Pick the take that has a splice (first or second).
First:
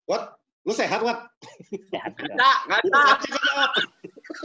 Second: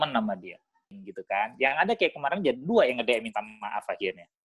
second